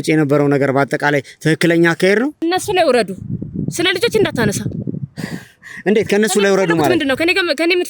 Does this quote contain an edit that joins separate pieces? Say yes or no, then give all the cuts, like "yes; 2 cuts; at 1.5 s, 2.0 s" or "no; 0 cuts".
yes; 1 cut; at 2.4 s